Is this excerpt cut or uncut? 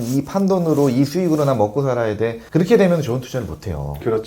cut